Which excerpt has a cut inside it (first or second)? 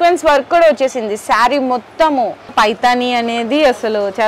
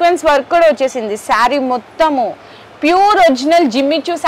first